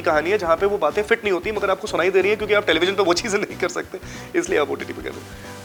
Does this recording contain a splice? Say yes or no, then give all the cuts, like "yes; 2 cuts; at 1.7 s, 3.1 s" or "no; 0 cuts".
no; 0 cuts